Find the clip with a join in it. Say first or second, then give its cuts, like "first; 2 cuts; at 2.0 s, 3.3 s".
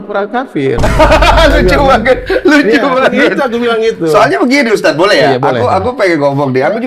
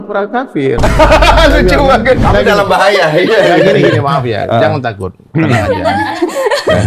second; 1 cut; at 2.2 s